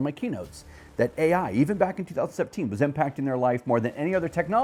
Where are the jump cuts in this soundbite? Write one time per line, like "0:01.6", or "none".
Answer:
none